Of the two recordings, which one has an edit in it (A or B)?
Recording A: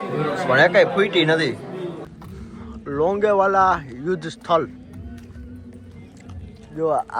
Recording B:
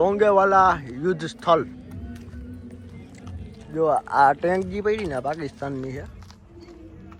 A